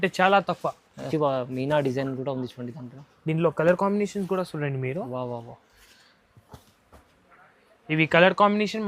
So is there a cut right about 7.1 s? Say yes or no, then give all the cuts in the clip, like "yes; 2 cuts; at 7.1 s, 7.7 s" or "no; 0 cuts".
no; 1 cut; at 0.9 s